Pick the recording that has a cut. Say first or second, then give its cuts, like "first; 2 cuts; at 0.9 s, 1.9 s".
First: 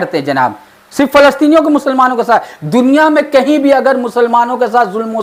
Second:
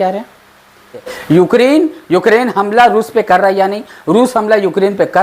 second; 1 cut; at 1.1 s